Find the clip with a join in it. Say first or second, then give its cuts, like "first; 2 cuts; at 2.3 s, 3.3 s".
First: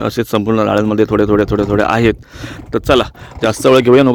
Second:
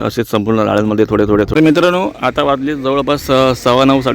second; 1 cut; at 1.5 s